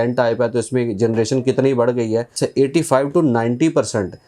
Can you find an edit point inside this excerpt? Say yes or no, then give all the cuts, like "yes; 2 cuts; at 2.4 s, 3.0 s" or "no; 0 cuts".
yes; 1 cut; at 2.3 s